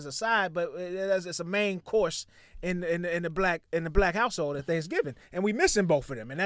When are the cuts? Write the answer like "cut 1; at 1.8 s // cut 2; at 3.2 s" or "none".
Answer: none